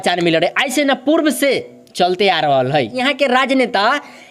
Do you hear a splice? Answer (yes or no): yes